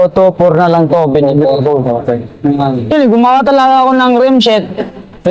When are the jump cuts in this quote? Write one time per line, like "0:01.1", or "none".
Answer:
0:02.9

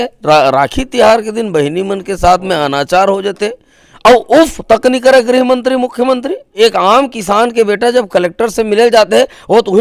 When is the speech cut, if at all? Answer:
0:06.5

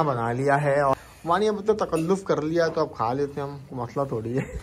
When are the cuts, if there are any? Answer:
0:01.0

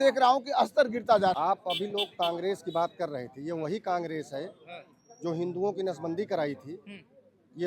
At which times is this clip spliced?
0:01.3

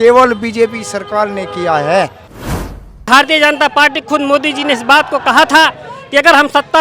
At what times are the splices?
0:02.5

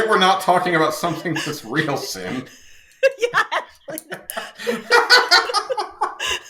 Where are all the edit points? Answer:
none

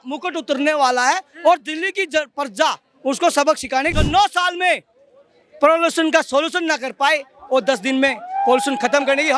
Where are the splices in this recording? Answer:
0:03.9

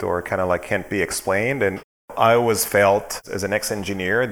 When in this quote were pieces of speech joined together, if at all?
0:02.1

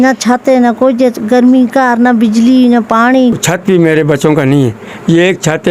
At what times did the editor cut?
0:03.5

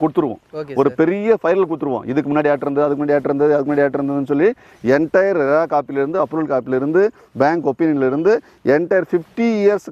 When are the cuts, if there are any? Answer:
none

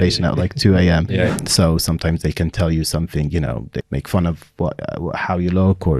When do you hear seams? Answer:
0:01.3
0:03.8

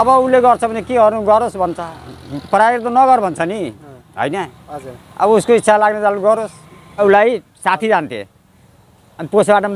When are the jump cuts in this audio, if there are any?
0:07.0

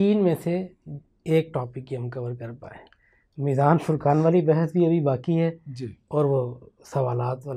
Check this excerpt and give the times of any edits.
none

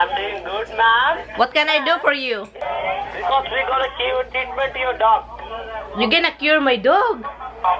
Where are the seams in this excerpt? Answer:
0:02.6

